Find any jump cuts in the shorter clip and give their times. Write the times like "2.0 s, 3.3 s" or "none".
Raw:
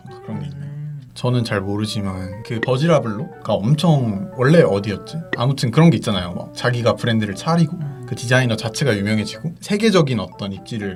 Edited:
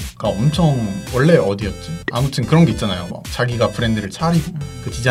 none